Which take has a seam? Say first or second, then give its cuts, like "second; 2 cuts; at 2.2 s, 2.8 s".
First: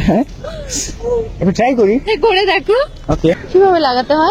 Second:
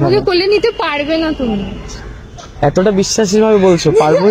first; 1 cut; at 3.4 s